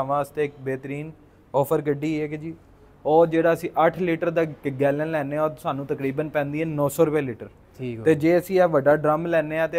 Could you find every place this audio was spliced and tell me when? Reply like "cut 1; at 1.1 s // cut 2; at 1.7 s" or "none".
none